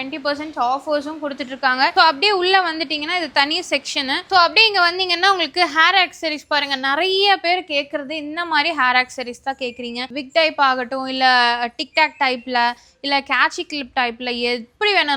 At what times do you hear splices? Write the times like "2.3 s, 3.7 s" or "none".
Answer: none